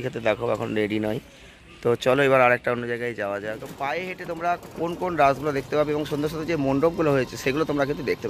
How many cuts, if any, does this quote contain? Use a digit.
1